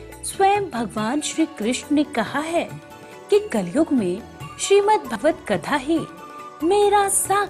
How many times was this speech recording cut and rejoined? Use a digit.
1